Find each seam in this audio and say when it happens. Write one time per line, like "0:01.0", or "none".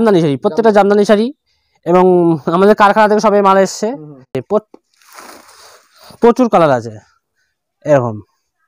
0:04.4